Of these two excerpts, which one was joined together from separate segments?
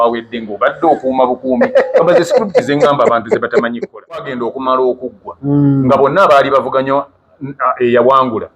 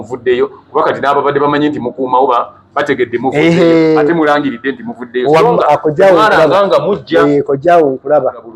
first; 1 cut; at 4.3 s

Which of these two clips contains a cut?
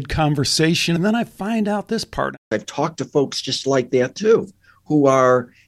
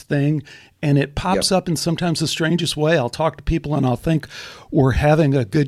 first; 2 cuts; at 1.0 s, 2.4 s

